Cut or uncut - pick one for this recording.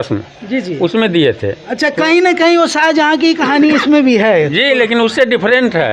uncut